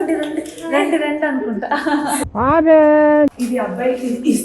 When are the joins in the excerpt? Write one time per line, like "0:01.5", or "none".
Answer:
0:03.3